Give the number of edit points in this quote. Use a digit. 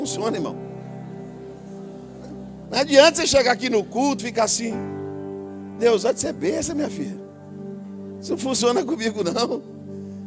0